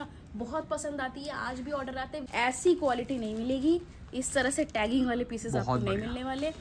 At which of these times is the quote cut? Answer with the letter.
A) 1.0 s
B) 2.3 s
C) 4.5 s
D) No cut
B